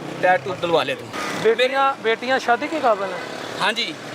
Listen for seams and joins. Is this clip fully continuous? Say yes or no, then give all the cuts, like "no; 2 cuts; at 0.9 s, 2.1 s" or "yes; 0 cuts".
no; 1 cut; at 1.2 s